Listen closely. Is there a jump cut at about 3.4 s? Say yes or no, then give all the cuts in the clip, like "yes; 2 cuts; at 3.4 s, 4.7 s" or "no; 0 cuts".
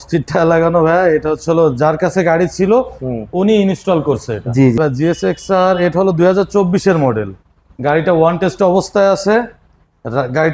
no; 1 cut; at 4.8 s